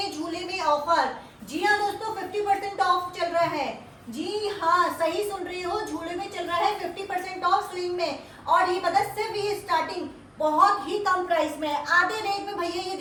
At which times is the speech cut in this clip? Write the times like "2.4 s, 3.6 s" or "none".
none